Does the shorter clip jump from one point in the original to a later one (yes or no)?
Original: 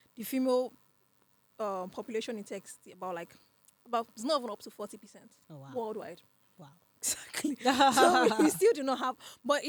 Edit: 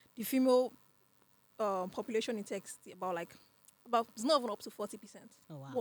no